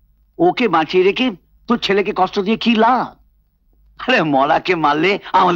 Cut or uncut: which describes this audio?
uncut